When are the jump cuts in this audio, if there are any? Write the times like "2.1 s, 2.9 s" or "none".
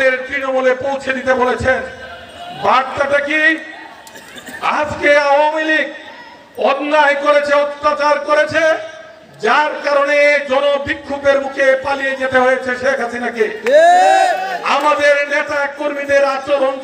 none